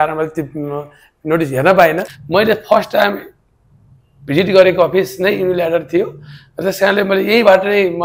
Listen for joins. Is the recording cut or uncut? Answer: cut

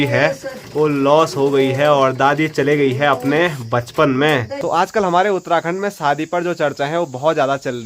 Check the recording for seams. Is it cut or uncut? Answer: cut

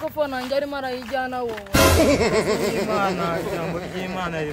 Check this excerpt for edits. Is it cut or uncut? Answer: uncut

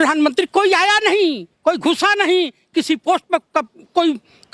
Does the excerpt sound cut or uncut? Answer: uncut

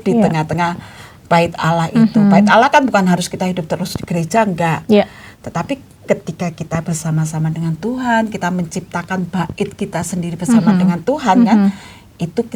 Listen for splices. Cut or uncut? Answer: uncut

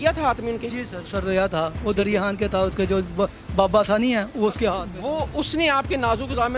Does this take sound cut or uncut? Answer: uncut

